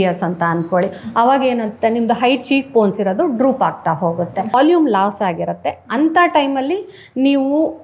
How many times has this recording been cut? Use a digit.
1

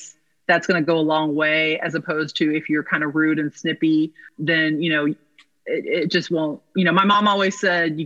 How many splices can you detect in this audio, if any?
1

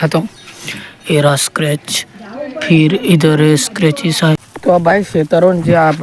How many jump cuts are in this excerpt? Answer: 1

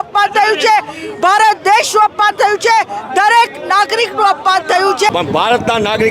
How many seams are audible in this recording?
1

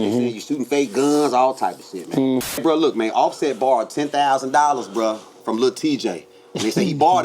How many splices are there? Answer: 1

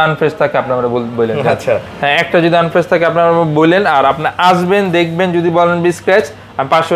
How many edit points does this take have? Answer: 0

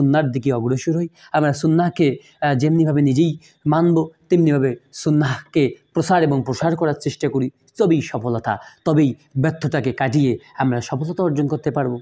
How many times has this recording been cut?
0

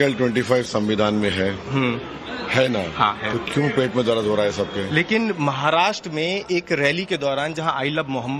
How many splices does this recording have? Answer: 1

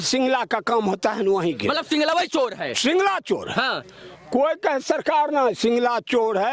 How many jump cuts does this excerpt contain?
0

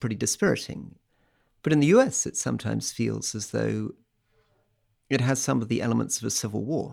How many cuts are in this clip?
1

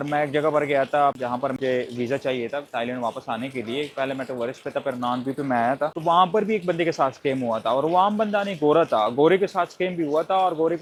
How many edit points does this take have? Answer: 0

